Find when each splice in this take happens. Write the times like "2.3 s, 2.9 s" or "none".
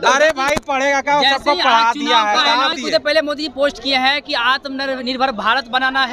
2.7 s